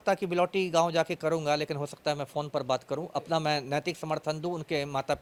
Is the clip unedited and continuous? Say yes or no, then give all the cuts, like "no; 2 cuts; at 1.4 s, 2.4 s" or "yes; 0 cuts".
yes; 0 cuts